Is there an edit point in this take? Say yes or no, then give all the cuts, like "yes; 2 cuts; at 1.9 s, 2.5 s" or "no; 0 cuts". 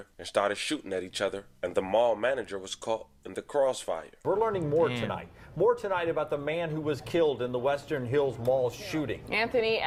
no; 0 cuts